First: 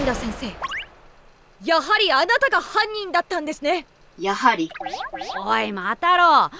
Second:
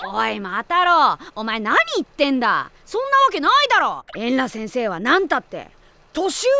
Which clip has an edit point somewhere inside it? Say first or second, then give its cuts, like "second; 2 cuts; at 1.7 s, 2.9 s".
second; 1 cut; at 4.1 s